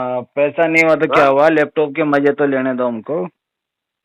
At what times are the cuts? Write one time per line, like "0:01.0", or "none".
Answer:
none